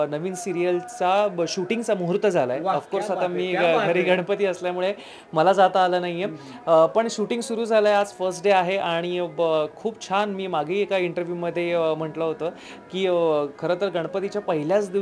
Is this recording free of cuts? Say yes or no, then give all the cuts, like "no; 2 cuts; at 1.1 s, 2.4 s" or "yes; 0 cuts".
yes; 0 cuts